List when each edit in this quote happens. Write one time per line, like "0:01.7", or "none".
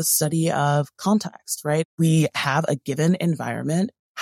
0:01.9